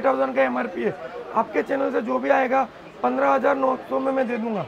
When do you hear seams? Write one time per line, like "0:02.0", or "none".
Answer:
none